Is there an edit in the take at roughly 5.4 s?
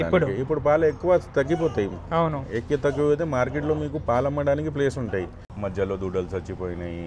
yes; 1 cut; at 5.4 s

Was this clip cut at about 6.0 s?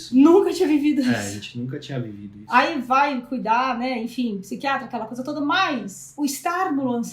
yes; 1 cut; at 6.0 s

